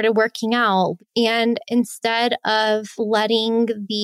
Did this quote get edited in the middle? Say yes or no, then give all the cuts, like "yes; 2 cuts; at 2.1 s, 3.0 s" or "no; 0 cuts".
yes; 2 cuts; at 1.0 s, 2.9 s